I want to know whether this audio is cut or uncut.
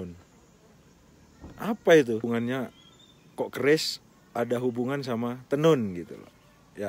cut